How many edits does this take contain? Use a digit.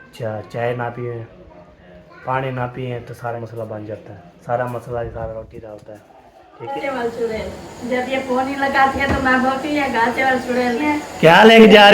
3